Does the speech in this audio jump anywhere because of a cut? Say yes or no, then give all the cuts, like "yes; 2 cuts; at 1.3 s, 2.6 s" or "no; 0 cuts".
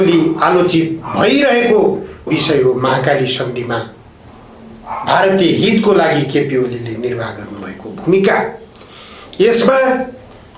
yes; 1 cut; at 2.3 s